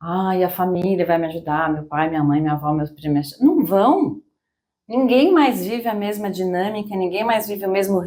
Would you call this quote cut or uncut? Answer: uncut